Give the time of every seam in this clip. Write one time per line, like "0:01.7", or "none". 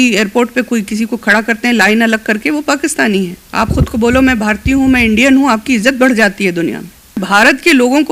0:03.4
0:07.2